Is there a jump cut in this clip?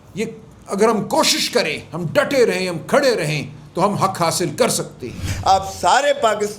yes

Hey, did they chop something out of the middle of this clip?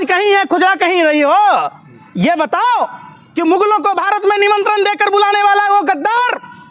no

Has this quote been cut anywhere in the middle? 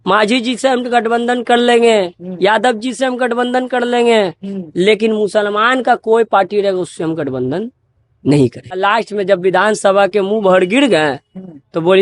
yes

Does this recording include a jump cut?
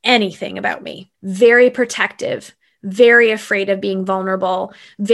no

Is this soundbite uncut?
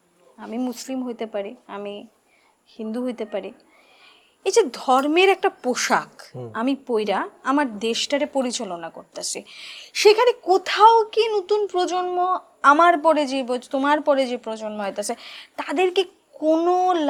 yes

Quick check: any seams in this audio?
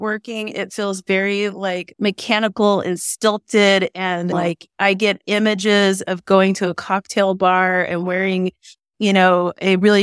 yes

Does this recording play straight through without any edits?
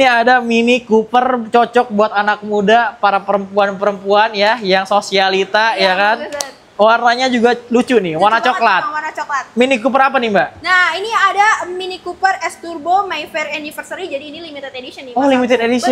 yes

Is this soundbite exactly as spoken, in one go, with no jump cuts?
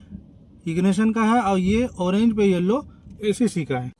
yes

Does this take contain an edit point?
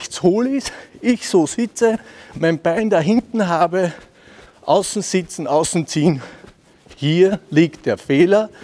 no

